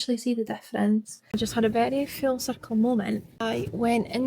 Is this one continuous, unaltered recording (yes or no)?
no